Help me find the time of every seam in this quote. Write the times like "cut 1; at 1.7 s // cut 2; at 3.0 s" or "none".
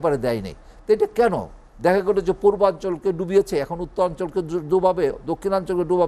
none